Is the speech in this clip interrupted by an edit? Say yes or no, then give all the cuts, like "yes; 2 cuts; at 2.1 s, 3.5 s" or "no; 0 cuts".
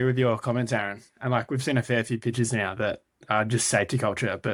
no; 0 cuts